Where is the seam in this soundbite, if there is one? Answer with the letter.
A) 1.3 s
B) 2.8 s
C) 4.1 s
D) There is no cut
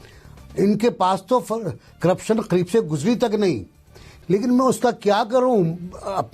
C